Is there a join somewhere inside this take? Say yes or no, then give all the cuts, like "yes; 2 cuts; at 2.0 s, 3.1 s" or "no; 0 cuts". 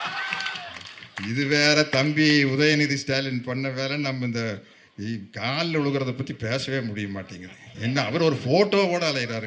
no; 0 cuts